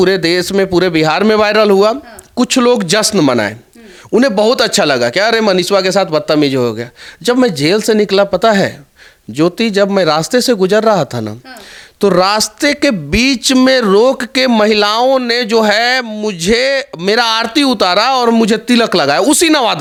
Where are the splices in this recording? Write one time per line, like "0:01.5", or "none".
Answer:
none